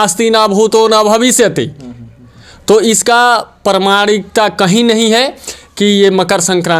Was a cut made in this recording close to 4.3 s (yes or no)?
no